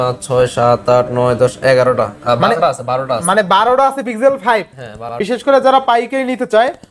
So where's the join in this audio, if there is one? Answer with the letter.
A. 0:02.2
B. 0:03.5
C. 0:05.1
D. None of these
C